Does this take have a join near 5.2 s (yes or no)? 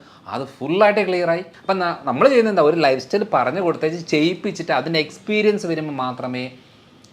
no